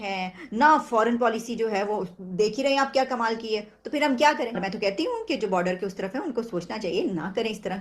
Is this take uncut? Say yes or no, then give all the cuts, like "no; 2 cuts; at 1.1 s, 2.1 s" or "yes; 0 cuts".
no; 1 cut; at 4.7 s